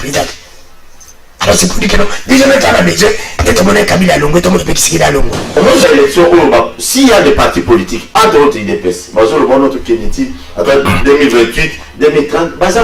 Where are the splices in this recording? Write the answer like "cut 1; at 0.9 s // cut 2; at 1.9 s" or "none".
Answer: cut 1; at 5.4 s